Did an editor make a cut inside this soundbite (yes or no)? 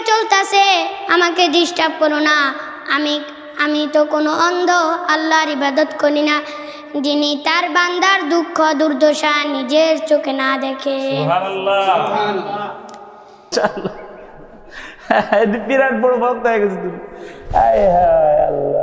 yes